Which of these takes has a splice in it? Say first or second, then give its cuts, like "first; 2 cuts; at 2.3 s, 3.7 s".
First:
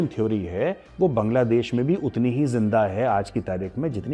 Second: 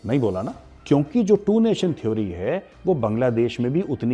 second; 1 cut; at 0.9 s